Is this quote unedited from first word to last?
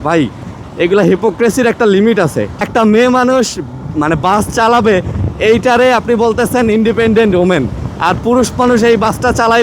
no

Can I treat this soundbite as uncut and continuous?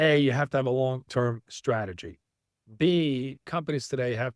no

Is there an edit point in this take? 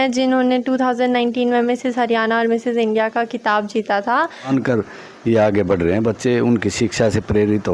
yes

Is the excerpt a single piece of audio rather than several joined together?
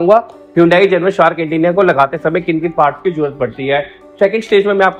yes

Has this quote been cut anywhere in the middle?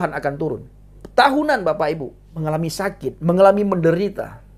yes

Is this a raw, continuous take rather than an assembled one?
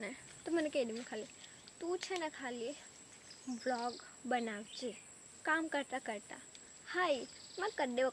yes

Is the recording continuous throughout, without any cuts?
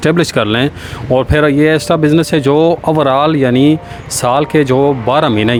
yes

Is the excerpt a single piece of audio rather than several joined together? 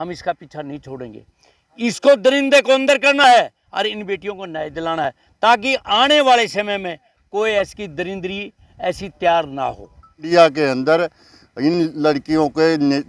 no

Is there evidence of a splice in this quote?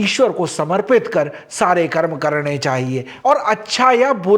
yes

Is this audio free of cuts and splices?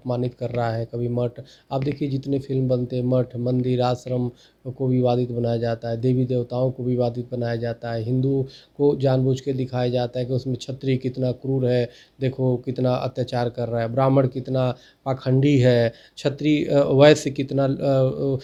yes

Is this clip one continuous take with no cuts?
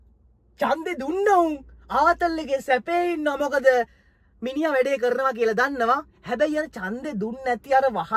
yes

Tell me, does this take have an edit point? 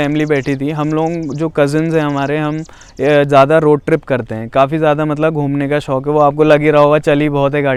no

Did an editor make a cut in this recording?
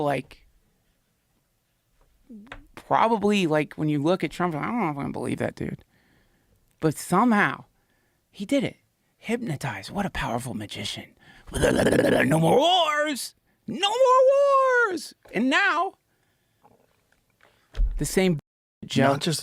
no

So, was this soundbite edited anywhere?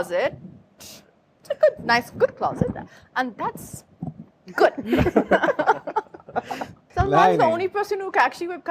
yes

